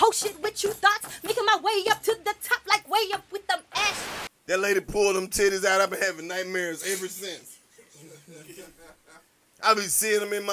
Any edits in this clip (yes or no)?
yes